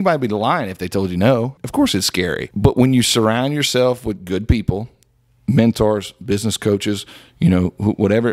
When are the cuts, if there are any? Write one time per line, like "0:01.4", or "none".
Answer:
0:01.6
0:02.4